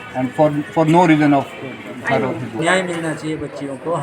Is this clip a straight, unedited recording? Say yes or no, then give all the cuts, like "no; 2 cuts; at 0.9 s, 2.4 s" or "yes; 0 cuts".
no; 1 cut; at 2.6 s